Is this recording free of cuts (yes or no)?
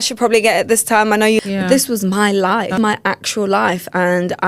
no